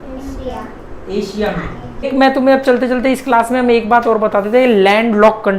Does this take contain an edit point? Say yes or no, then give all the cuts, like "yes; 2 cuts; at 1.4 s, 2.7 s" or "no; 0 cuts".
yes; 1 cut; at 2.1 s